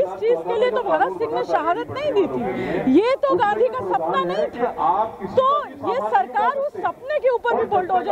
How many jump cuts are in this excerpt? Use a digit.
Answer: 0